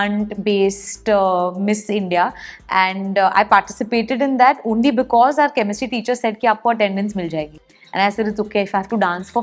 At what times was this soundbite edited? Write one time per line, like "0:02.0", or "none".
none